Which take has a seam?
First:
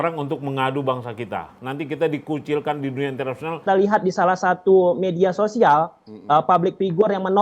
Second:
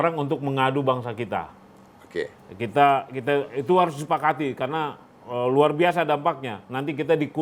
first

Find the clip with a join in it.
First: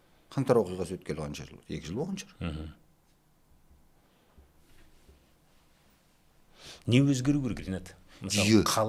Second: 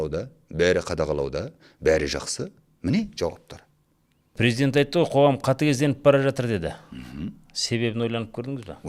second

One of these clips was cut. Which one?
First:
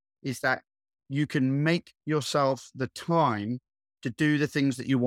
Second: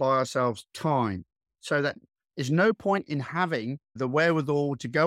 second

